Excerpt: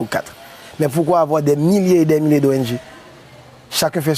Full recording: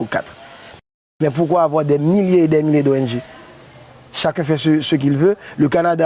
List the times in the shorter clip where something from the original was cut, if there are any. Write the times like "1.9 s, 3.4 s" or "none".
0.9 s